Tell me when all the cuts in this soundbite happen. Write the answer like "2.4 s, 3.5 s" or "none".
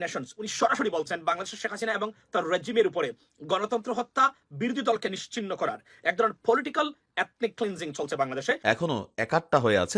8.6 s